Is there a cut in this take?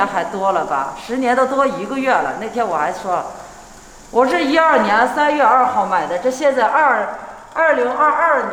no; 0 cuts

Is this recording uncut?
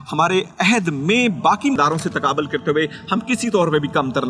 yes; 0 cuts

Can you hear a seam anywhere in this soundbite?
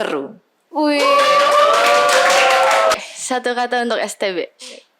yes; 1 cut; at 2.9 s

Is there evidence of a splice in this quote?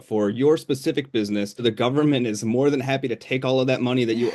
yes; 1 cut; at 1.6 s

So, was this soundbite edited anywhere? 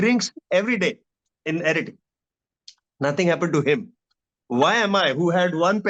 no; 0 cuts

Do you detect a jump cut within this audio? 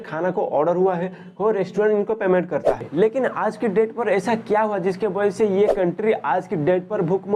yes; 1 cut; at 2.7 s

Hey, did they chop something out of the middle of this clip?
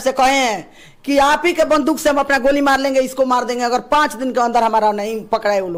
no; 0 cuts

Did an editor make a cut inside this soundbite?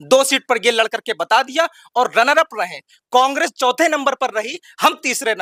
no; 0 cuts

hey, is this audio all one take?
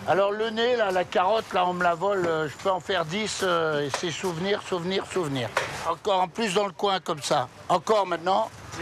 no; 1 cut; at 5.8 s

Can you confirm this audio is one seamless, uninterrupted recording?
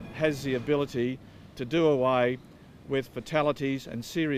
no; 1 cut; at 3.3 s

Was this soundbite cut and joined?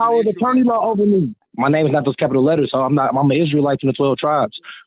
yes; 1 cut; at 1.4 s

